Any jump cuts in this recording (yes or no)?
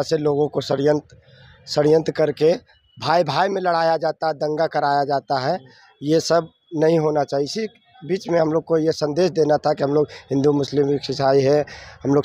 no